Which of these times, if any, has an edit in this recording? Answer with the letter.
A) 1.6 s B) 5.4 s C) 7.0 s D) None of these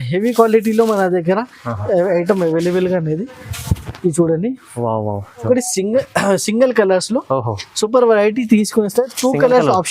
B